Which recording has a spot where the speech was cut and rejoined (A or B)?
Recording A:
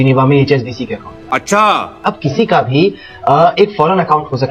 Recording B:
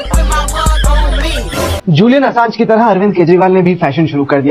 B